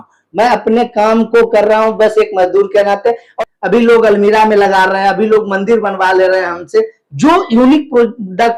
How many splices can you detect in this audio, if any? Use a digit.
1